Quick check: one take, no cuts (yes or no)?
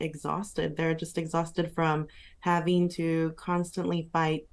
yes